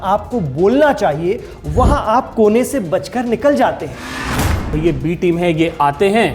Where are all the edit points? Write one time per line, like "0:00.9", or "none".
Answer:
0:04.3